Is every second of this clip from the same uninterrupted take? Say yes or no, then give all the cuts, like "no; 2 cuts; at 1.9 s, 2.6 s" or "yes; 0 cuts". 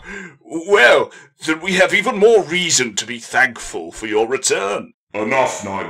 no; 1 cut; at 5.0 s